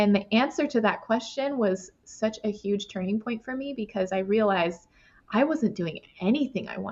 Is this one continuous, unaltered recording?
yes; 0 cuts

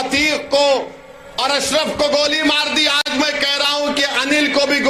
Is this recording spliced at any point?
no; 0 cuts

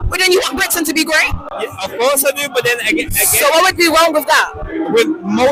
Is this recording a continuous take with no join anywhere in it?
yes; 0 cuts

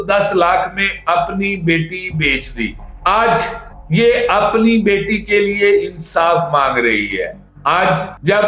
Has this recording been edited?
yes; 1 cut; at 2.9 s

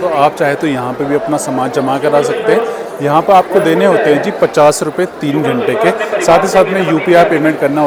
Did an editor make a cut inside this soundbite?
no; 0 cuts

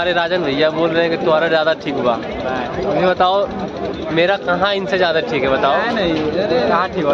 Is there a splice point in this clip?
no; 0 cuts

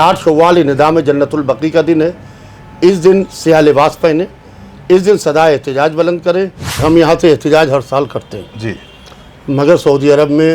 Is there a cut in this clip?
yes; 1 cut; at 6.8 s

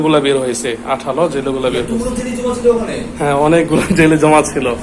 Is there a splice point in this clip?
no; 0 cuts

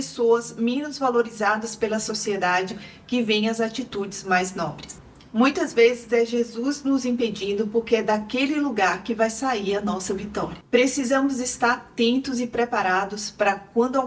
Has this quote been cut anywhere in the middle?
yes; 2 cuts; at 5.1 s, 10.6 s

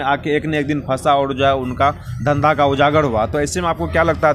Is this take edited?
no; 0 cuts

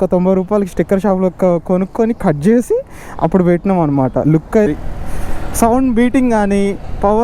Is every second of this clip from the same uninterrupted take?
no; 1 cut; at 4.7 s

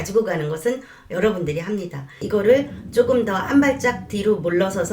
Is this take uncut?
no; 1 cut; at 2.1 s

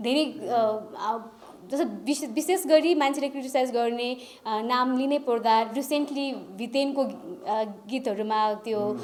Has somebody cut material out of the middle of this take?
no; 0 cuts

